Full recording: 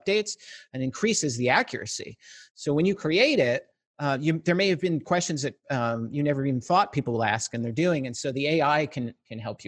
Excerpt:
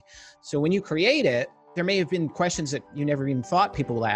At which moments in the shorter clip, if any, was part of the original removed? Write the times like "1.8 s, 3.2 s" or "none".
1.7 s, 2.9 s